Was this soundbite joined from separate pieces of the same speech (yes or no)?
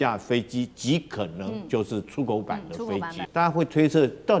yes